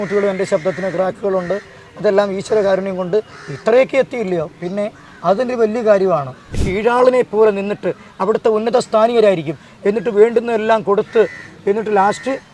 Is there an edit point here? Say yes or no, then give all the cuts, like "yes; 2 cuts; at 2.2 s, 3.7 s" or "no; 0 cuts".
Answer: yes; 1 cut; at 6.7 s